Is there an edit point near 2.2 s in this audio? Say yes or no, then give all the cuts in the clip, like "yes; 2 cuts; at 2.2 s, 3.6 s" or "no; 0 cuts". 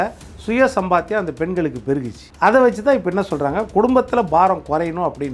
yes; 1 cut; at 2.2 s